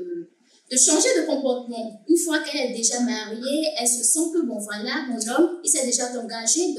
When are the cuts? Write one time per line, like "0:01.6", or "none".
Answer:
none